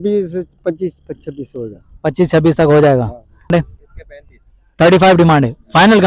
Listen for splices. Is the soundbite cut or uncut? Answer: cut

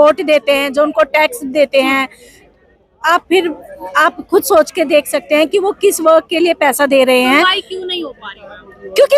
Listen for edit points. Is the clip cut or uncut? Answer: uncut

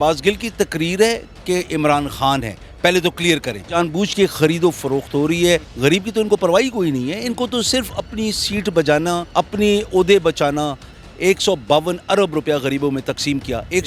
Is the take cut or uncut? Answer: cut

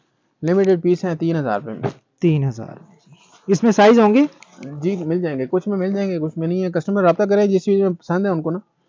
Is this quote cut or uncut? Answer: uncut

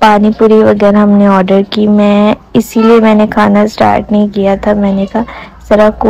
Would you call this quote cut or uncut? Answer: uncut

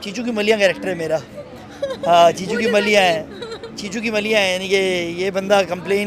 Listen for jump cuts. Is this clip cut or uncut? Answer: uncut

